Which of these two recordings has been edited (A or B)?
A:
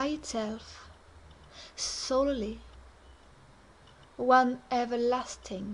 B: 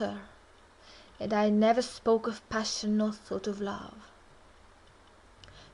B